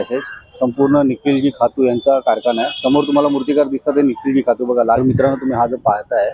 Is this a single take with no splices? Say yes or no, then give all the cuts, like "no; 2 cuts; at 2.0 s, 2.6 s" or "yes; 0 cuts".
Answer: no; 1 cut; at 5.0 s